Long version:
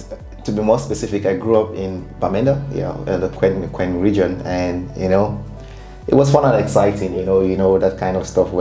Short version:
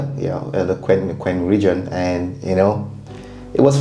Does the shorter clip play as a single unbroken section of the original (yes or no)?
yes